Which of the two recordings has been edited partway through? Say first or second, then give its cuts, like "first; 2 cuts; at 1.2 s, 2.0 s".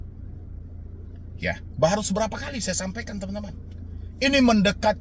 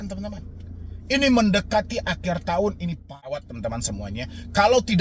second; 1 cut; at 3.4 s